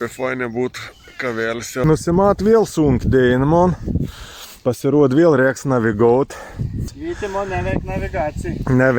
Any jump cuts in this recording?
yes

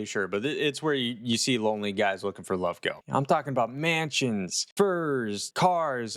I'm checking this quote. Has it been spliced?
yes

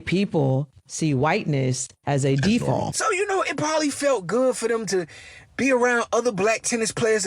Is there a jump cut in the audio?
yes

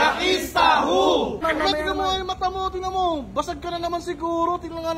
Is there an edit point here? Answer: yes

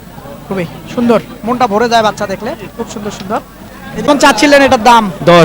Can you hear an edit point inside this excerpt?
yes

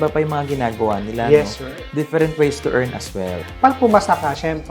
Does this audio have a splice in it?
yes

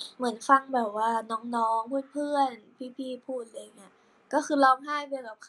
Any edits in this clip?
no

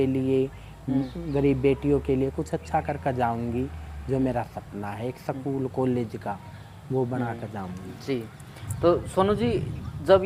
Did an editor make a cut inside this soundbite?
no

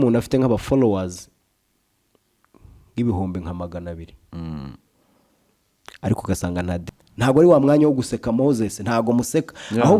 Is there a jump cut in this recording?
yes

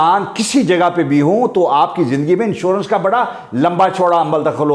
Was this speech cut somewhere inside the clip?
no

